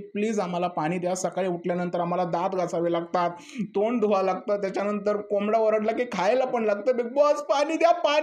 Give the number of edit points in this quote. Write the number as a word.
zero